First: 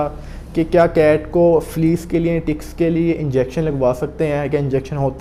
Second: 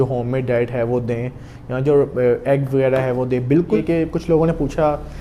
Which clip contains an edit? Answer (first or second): second